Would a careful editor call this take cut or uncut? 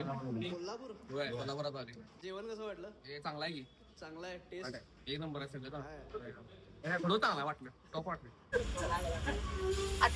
cut